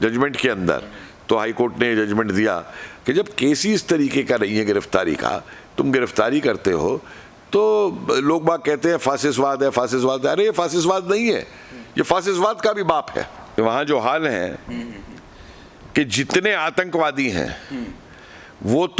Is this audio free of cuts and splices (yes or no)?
no